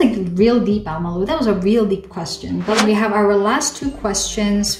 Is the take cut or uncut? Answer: uncut